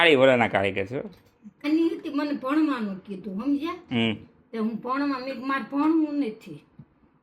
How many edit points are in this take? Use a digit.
1